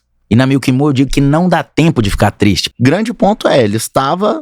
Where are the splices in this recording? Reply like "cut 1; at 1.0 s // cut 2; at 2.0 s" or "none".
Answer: cut 1; at 2.6 s